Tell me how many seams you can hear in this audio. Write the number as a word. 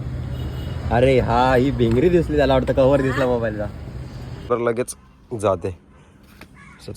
one